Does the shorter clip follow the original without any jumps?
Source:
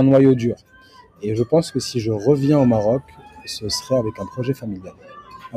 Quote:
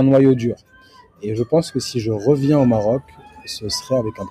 yes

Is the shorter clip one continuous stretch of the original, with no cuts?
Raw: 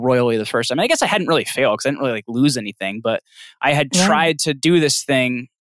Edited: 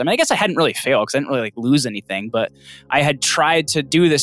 yes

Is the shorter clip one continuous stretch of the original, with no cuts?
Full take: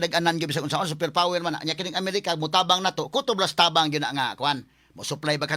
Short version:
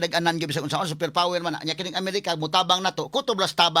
yes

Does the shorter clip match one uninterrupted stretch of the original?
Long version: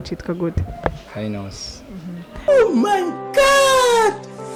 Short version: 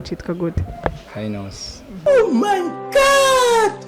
no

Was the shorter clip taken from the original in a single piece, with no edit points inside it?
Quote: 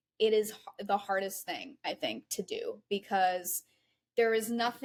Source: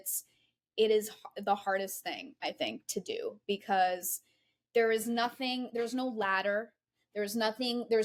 yes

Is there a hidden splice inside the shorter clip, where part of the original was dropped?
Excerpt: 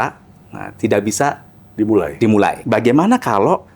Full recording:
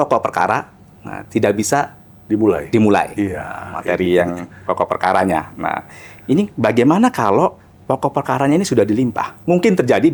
yes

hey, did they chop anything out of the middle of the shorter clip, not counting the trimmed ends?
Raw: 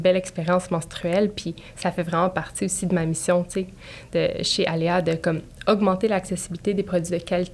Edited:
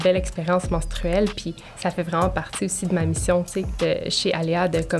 yes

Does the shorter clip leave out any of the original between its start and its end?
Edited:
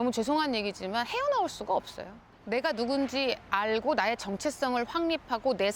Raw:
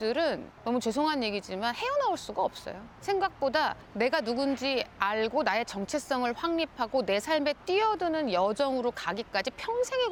yes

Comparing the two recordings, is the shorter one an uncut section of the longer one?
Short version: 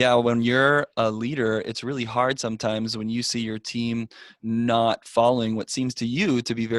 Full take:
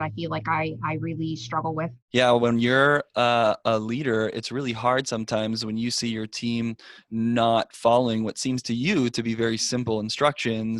no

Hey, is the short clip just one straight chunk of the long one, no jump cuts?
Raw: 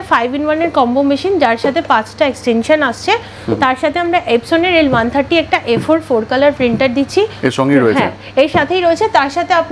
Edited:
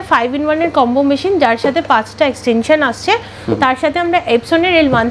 yes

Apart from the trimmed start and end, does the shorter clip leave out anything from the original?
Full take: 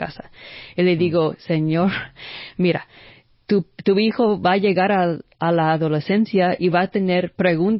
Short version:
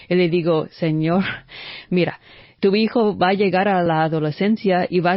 yes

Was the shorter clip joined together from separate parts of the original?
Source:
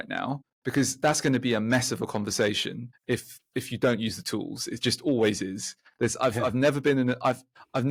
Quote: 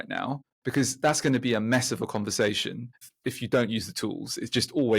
yes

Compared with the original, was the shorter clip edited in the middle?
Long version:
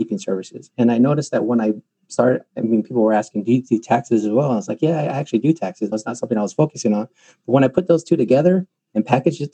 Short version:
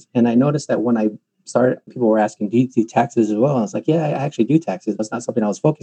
yes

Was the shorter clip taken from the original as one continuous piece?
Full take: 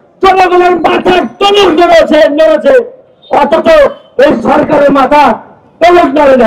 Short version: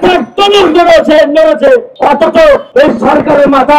no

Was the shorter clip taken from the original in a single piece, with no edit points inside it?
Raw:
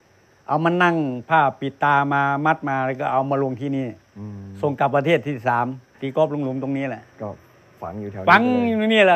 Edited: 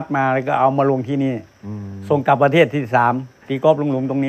yes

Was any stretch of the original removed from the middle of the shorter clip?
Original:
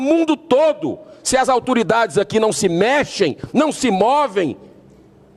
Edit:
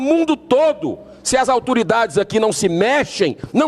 no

